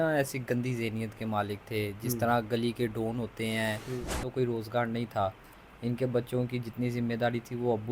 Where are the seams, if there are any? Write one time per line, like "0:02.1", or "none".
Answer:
0:04.3

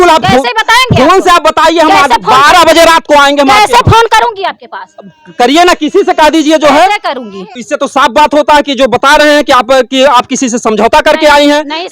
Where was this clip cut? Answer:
0:07.5

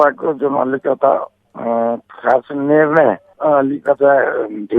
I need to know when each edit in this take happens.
none

